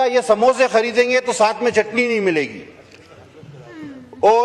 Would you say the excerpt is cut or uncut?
uncut